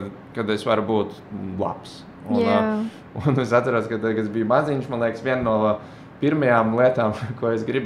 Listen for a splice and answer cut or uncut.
uncut